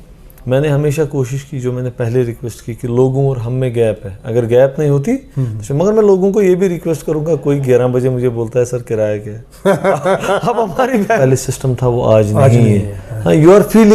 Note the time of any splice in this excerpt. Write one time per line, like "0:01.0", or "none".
0:11.2

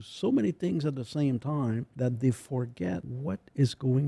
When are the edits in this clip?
0:01.9
0:03.1

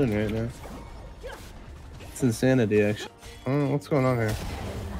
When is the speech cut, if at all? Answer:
0:03.1

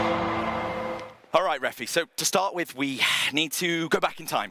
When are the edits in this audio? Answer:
0:01.1

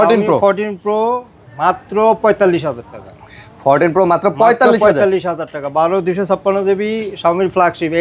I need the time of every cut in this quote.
none

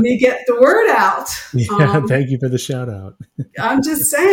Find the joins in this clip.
none

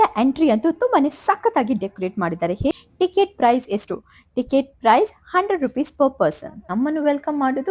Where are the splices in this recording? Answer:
0:02.7
0:06.6

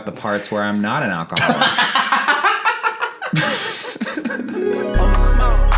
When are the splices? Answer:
0:04.6

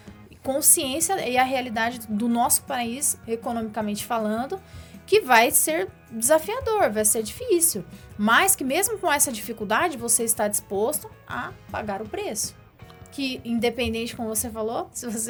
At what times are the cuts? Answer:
none

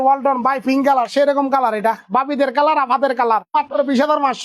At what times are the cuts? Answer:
0:03.5

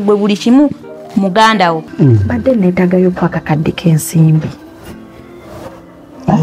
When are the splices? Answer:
0:01.9

